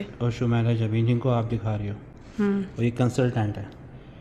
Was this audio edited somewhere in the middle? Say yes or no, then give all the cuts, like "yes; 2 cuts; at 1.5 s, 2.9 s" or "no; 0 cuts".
no; 0 cuts